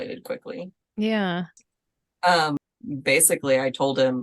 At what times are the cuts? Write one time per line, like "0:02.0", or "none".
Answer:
0:02.6